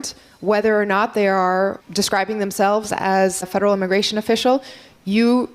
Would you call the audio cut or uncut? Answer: cut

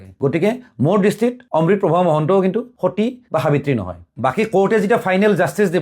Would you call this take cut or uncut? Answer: cut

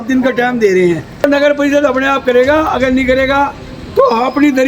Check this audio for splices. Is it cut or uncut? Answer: cut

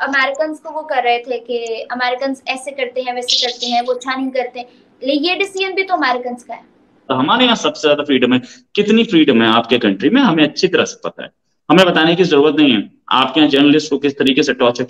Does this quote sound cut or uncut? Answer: cut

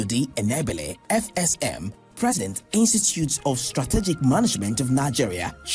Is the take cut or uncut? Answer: cut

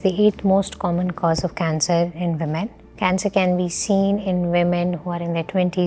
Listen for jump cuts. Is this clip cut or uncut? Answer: cut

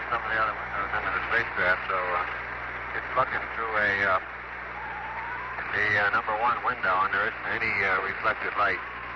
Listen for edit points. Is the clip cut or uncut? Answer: uncut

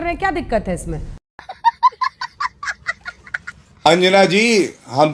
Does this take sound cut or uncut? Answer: uncut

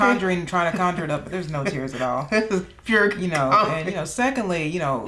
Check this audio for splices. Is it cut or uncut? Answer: uncut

